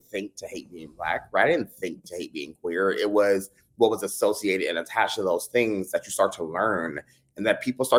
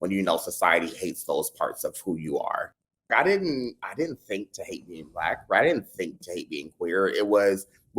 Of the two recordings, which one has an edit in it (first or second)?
second